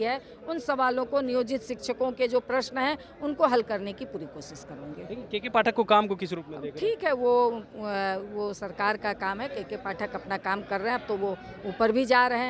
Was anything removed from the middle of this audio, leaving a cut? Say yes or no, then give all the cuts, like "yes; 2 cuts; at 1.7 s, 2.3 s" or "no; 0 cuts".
no; 0 cuts